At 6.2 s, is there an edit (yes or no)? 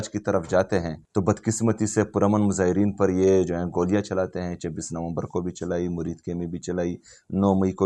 no